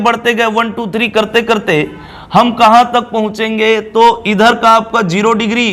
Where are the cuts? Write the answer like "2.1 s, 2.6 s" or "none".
none